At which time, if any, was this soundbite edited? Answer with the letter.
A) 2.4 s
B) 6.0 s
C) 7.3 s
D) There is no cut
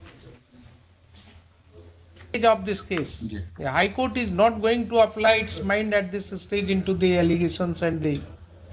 A